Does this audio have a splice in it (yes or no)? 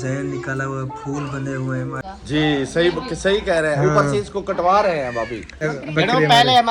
yes